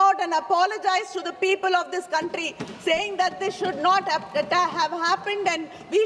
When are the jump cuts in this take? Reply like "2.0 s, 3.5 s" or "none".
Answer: none